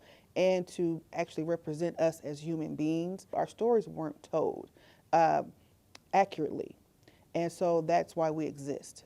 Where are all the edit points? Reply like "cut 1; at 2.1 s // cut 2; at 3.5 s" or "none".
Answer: cut 1; at 3.3 s